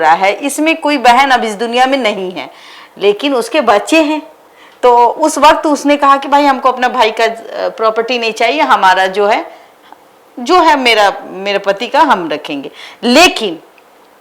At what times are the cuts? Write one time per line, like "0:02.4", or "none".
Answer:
none